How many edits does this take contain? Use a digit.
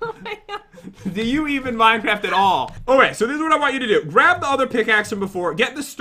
1